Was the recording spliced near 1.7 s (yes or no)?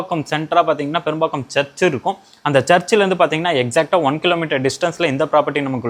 no